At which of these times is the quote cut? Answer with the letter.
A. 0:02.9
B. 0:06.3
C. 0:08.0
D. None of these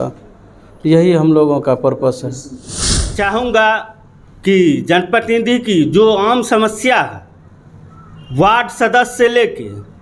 A